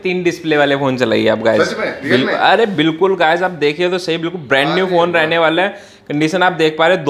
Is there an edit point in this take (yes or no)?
no